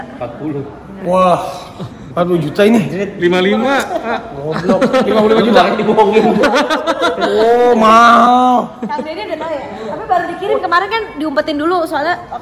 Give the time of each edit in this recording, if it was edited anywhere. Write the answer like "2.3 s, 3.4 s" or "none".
none